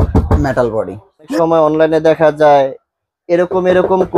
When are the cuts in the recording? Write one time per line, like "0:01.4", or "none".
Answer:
0:01.3